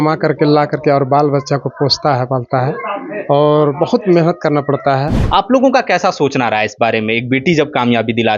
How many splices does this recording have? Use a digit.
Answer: 1